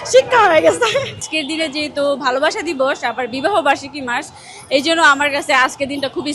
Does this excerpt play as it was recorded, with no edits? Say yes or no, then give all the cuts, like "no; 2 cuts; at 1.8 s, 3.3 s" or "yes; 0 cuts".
no; 1 cut; at 1.3 s